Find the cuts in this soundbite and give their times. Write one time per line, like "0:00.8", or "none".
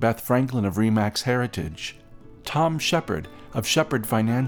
none